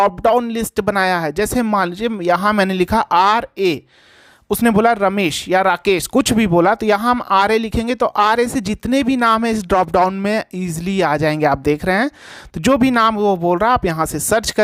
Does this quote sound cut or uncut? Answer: uncut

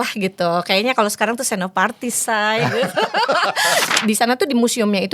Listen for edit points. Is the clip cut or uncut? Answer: cut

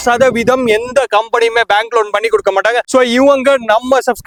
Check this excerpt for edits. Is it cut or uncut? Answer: uncut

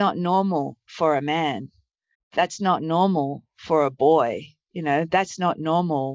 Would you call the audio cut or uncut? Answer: uncut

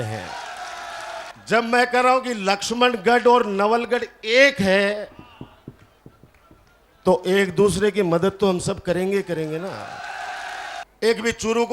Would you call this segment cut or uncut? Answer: cut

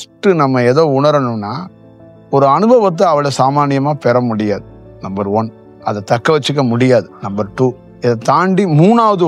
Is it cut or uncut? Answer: cut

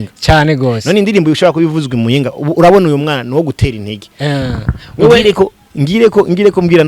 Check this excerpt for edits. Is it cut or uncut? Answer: uncut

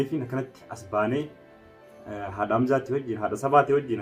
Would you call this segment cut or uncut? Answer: uncut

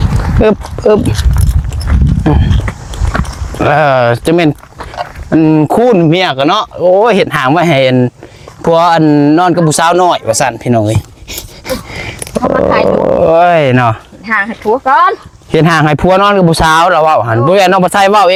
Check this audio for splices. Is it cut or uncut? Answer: uncut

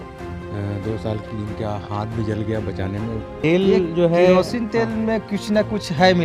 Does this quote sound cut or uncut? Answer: cut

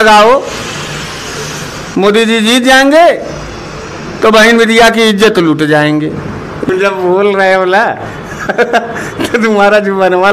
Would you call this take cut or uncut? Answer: cut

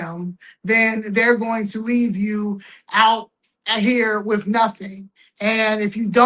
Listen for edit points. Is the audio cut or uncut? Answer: uncut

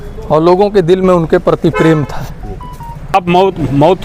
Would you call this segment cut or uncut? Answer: cut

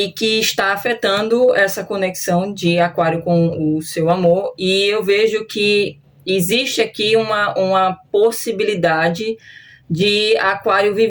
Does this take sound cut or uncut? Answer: uncut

